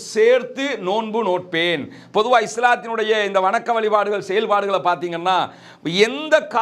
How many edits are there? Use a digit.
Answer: 0